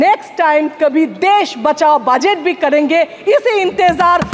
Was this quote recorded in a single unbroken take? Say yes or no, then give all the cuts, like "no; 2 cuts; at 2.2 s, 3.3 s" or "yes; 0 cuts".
yes; 0 cuts